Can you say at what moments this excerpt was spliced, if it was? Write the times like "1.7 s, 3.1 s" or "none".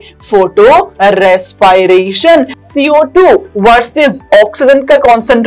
2.5 s